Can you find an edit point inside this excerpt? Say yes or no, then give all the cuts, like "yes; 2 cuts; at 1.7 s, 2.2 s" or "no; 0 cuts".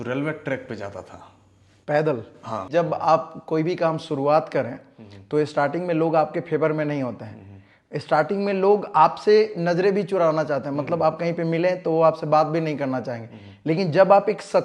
yes; 1 cut; at 2.7 s